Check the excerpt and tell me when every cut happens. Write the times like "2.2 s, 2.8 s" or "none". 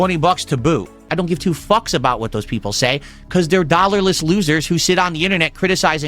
1.1 s